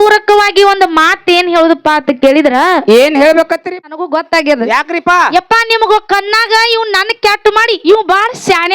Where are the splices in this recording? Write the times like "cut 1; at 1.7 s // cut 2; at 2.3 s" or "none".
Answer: cut 1; at 3.7 s